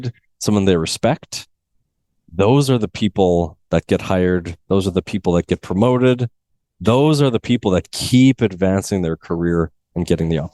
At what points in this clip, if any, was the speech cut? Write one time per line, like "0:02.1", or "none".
none